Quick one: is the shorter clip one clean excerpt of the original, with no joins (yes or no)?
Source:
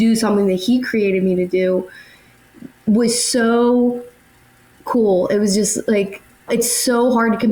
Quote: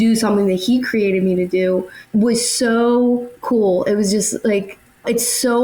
no